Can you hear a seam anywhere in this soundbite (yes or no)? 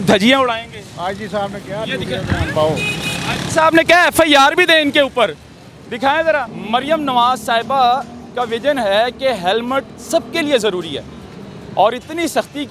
yes